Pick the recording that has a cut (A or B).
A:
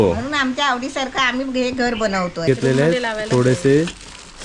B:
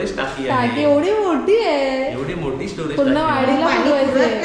A